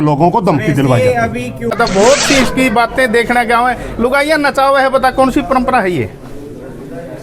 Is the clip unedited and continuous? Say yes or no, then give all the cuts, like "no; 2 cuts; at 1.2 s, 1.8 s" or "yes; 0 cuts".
no; 1 cut; at 1.8 s